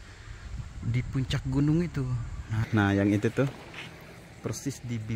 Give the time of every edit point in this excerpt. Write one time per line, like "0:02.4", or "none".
0:02.6

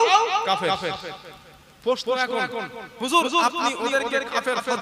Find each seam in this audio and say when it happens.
none

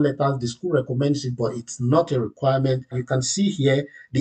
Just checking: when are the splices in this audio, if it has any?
0:02.9

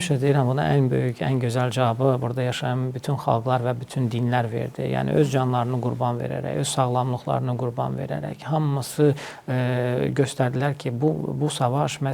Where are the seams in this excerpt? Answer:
none

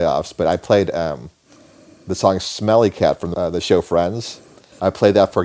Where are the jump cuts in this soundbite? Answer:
none

